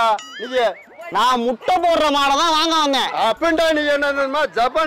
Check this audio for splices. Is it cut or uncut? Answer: uncut